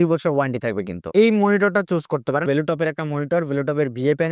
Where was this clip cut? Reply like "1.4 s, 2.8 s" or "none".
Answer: 1.0 s, 2.4 s